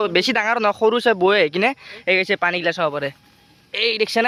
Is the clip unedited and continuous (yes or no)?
yes